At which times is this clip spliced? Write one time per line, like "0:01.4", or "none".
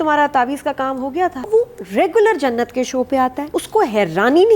0:01.4
0:03.4